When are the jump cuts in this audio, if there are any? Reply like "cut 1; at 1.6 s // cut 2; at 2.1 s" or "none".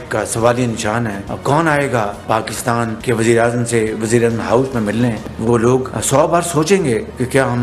cut 1; at 1.2 s // cut 2; at 5.2 s